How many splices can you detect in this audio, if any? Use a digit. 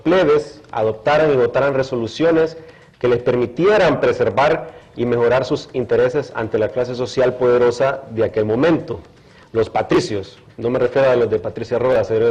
0